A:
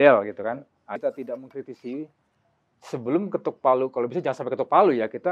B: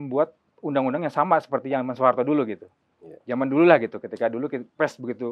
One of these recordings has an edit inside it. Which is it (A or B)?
A